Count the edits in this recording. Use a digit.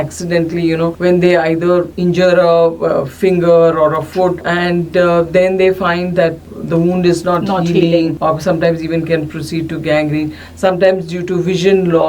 5